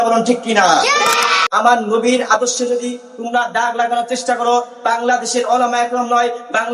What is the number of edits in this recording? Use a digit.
1